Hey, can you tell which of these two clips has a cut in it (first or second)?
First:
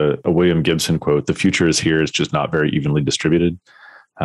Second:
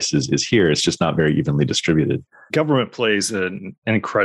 second